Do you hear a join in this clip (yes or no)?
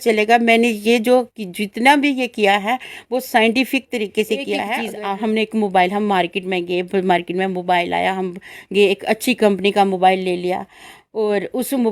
yes